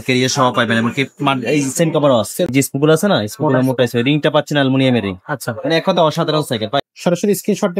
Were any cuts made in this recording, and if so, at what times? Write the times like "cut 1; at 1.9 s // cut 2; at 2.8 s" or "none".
cut 1; at 2.5 s // cut 2; at 6.8 s